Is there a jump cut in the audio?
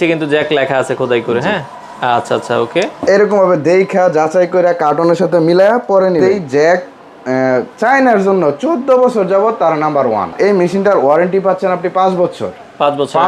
yes; 2 cuts; at 6.4 s, 10.3 s

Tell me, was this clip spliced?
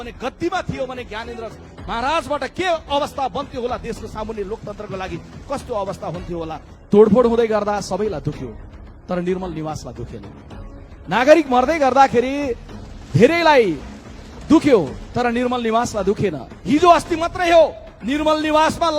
yes; 2 cuts; at 6.7 s, 16.5 s

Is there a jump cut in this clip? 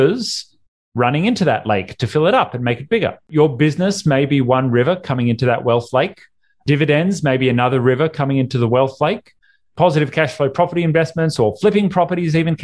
yes; 1 cut; at 3.3 s

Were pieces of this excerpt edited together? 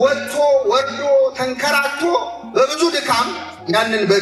no; 0 cuts

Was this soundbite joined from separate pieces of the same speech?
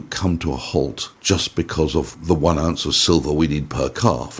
yes; 2 cuts; at 1.1 s, 2.1 s

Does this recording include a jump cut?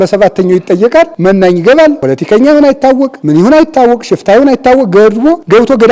no; 0 cuts

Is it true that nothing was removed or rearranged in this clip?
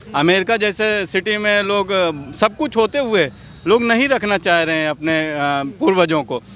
yes; 0 cuts

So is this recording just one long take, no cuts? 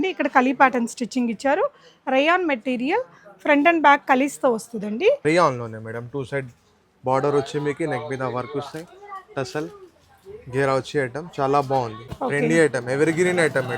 no; 2 cuts; at 5.2 s, 12.0 s

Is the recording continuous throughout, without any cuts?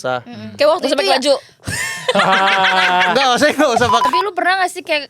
no; 1 cut; at 4.1 s

